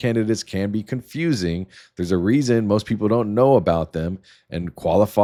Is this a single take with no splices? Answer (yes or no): yes